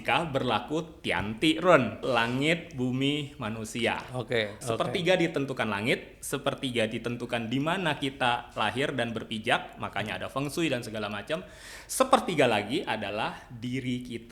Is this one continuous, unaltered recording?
no; 2 cuts; at 2.0 s, 4.6 s

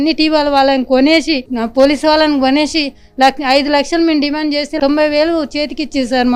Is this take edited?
no; 0 cuts

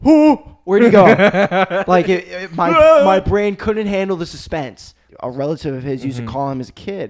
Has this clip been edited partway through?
yes; 1 cut; at 5.0 s

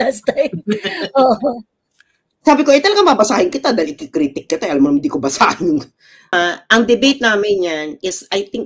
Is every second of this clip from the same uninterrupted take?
no; 1 cut; at 6.3 s

